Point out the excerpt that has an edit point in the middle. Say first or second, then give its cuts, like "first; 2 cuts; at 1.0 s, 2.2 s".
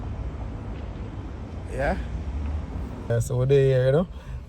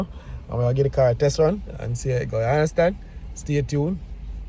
first; 1 cut; at 3.1 s